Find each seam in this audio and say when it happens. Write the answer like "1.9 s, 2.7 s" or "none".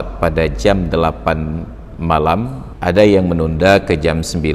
2.6 s